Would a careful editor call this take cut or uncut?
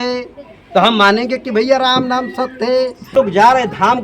cut